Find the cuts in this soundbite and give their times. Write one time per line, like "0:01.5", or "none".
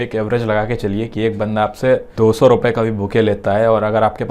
0:02.1